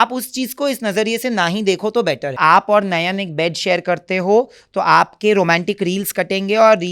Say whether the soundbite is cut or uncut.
cut